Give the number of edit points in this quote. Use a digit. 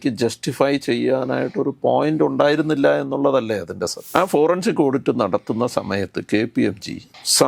1